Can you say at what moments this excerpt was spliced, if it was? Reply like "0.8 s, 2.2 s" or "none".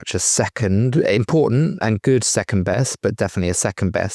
none